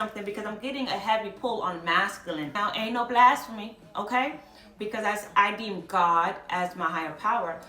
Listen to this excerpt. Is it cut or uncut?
cut